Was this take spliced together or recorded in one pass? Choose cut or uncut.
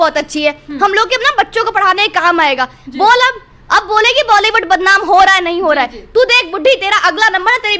uncut